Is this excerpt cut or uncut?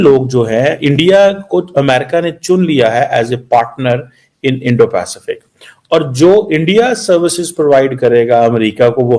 uncut